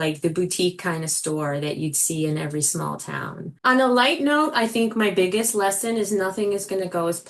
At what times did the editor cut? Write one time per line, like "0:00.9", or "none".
0:03.5

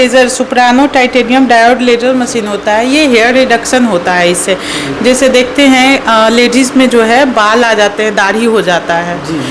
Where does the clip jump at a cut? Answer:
none

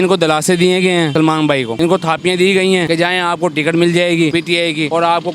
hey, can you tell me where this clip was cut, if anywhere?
0:01.3
0:02.9
0:04.6

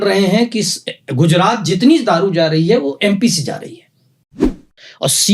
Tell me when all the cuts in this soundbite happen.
0:04.4

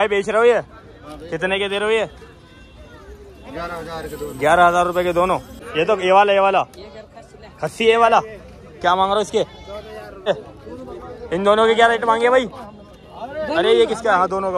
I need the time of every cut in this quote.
0:05.6
0:10.3

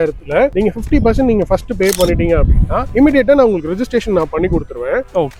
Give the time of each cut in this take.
none

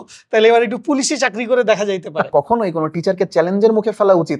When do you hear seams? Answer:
0:02.3

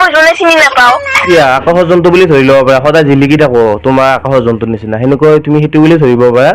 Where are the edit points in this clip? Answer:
0:01.2

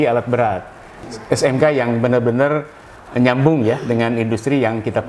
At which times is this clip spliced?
0:01.0

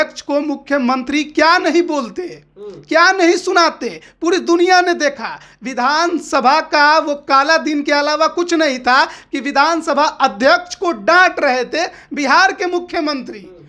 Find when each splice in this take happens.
none

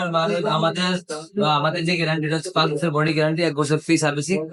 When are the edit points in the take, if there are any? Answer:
none

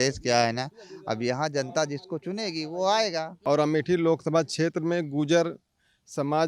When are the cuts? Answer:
0:03.3

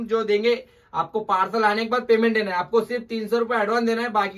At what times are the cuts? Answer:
none

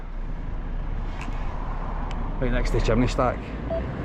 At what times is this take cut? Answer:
none

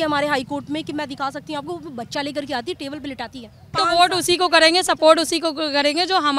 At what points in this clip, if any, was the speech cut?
0:03.7

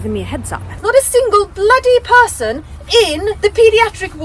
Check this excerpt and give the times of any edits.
0:00.8
0:03.2

